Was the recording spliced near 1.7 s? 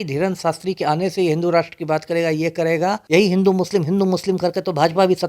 no; 1 cut; at 3.0 s

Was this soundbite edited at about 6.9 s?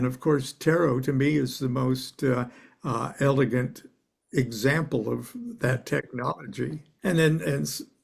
yes; 1 cut; at 6.9 s

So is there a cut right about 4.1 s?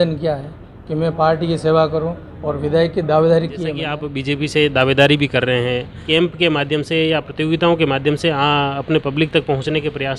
yes; 2 cuts; at 4.1 s, 6.1 s

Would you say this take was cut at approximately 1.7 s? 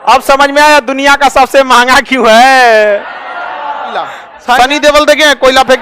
no; 1 cut; at 4.6 s

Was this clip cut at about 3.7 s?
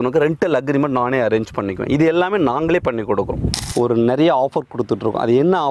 yes; 1 cut; at 3.7 s

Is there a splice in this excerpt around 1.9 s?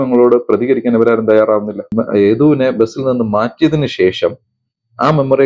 yes; 1 cut; at 1.9 s

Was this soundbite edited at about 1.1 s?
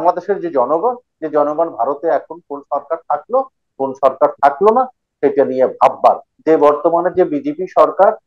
no; 1 cut; at 6.3 s

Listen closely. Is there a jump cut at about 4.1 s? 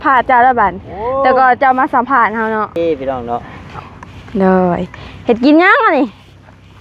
no; 1 cut; at 2.8 s

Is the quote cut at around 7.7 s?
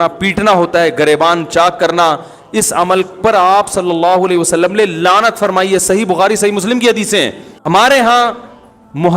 yes; 1 cut; at 7.7 s

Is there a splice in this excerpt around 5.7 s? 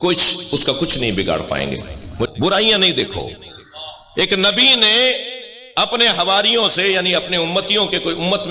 no; 1 cut; at 2.3 s

